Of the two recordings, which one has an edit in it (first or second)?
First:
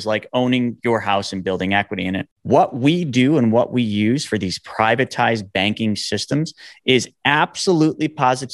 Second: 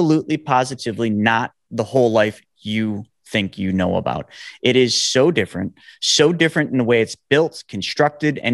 first